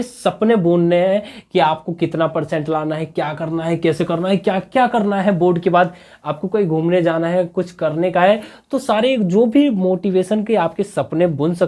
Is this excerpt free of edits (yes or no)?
yes